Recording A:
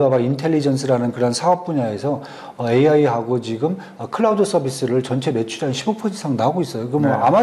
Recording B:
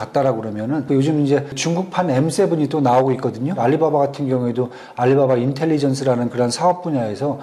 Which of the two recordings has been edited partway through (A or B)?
B